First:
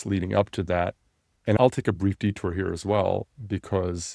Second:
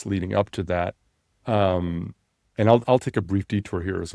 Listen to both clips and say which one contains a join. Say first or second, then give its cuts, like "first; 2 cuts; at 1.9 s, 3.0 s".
first; 1 cut; at 1.5 s